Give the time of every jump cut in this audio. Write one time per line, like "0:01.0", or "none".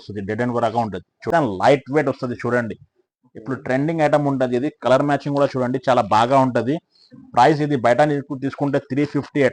0:01.3